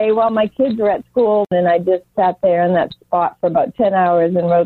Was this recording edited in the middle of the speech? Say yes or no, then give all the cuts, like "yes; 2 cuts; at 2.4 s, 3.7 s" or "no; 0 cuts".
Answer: yes; 1 cut; at 1.5 s